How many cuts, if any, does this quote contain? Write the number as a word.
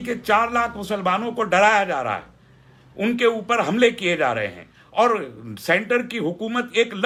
zero